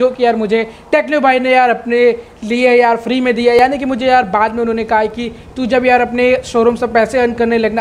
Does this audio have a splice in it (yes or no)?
no